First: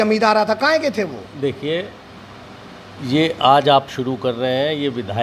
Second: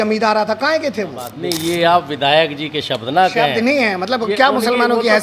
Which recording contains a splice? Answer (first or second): second